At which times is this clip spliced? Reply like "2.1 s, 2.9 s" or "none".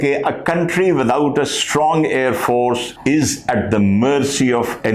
2.9 s

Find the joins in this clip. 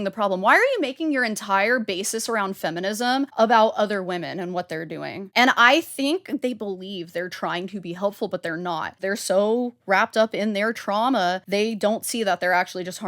3.3 s, 5.2 s, 6.4 s, 9.0 s, 11.4 s

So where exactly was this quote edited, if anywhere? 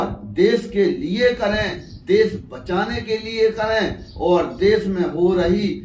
none

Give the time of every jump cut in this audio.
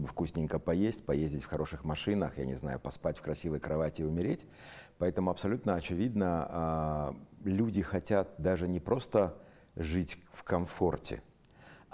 none

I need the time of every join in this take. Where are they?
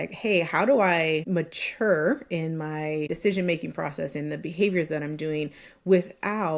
1.2 s, 3.1 s

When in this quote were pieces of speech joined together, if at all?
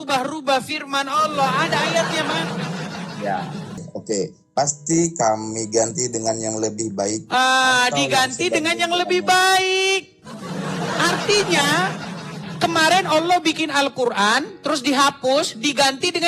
3.8 s

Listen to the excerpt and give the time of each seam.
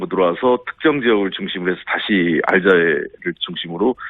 none

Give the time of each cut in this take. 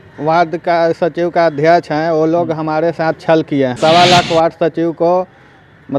3.7 s

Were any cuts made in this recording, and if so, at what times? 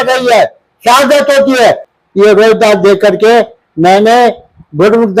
none

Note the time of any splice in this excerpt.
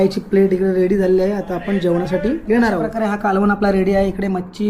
3.0 s

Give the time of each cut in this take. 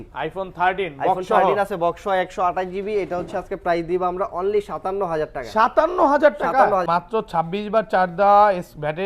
6.9 s

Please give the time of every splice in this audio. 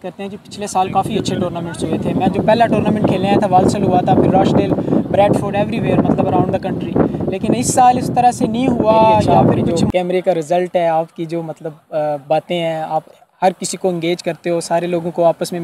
9.8 s

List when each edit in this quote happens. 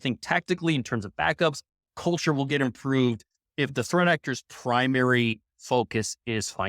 3.5 s

